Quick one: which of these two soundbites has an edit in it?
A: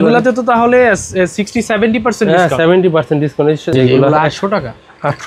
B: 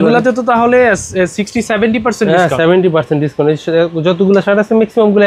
A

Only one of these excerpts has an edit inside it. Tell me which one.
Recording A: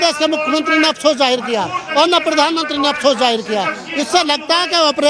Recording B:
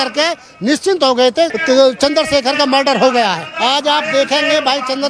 B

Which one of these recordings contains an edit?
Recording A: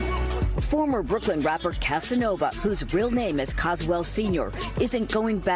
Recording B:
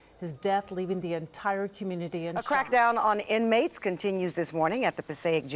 B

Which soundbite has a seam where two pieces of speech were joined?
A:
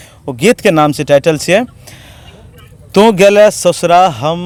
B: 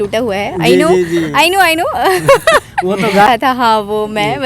B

